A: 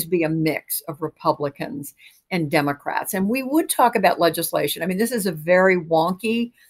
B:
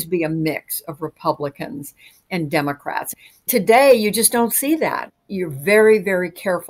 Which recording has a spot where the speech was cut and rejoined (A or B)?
B